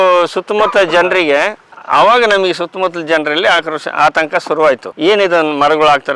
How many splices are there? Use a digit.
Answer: 1